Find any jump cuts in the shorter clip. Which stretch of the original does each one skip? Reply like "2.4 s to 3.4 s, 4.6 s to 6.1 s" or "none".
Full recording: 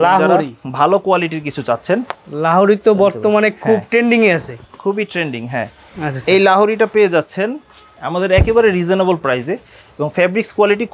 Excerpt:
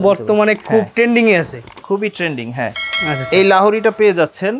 none

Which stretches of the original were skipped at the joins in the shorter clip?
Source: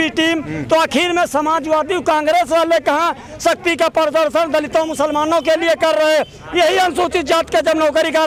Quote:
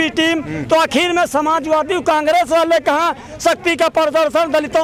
none

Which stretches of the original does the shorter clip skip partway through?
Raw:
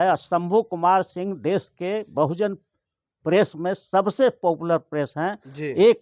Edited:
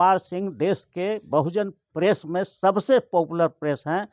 2.7 s to 3.1 s

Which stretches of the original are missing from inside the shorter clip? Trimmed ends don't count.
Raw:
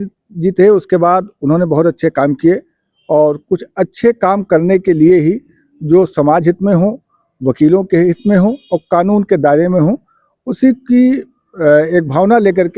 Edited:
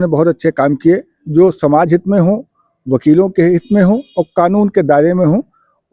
2.7 s to 5.7 s

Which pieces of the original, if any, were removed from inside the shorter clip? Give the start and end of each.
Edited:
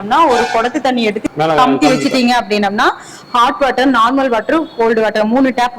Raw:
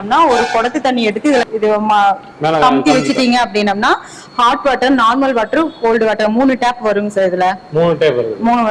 1.2 s to 2.2 s

